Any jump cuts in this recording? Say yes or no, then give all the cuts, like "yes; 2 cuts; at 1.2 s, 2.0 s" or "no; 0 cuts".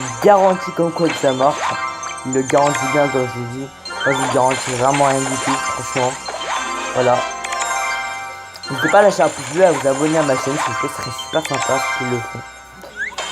yes; 1 cut; at 6.2 s